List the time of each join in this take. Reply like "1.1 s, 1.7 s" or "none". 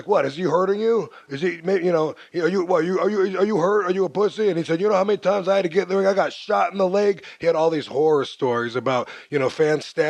8.0 s

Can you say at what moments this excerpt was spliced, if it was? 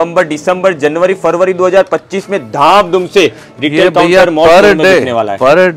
none

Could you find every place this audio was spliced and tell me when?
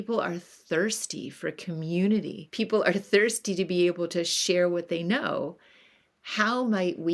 2.4 s

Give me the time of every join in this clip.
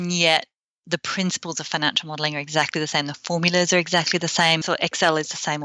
4.6 s

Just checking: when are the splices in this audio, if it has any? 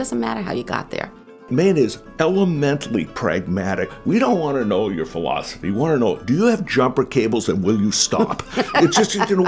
1.5 s, 2.0 s, 3.9 s, 6.2 s

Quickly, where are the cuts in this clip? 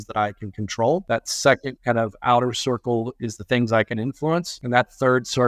1.0 s, 4.6 s

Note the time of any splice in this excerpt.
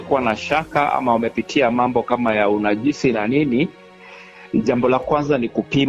none

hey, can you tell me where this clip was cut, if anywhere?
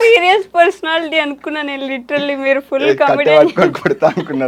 none

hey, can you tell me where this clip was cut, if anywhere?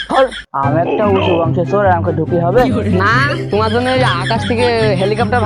none

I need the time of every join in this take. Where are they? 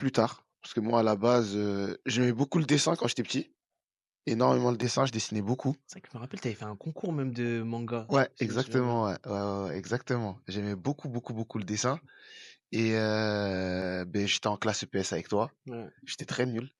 none

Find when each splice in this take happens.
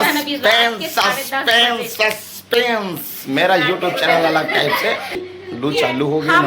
5.3 s

